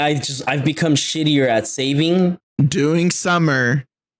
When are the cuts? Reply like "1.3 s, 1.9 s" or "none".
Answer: 2.5 s